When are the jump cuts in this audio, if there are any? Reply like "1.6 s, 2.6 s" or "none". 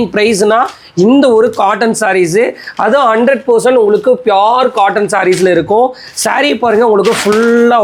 none

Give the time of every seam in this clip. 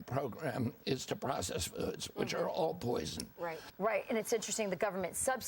3.7 s

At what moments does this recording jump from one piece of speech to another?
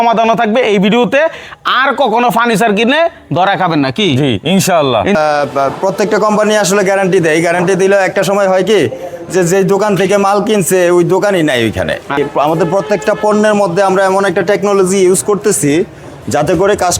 5.1 s, 12.2 s

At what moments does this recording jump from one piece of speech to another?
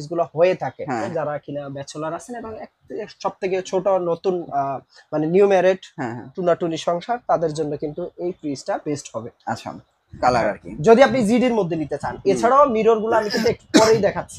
1.1 s, 10.1 s

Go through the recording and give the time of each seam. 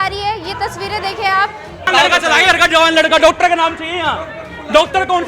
1.9 s

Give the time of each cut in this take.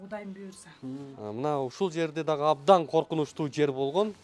1.0 s

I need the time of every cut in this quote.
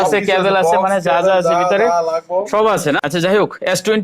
3.0 s

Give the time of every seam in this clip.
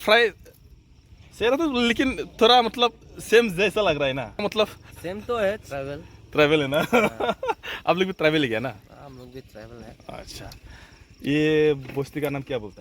4.4 s

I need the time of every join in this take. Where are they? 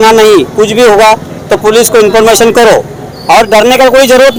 none

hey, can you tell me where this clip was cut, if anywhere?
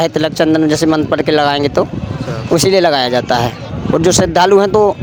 none

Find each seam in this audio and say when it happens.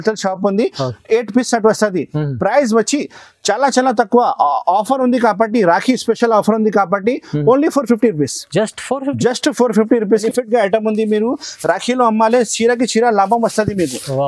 10.2 s

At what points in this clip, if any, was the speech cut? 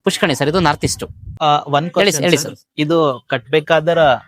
1.2 s

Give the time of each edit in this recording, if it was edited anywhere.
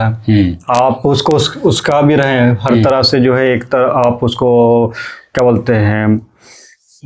none

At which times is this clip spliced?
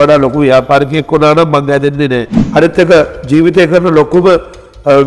2.4 s

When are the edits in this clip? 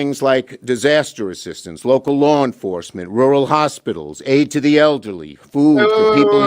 2.9 s

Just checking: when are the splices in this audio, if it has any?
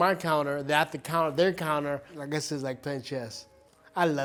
none

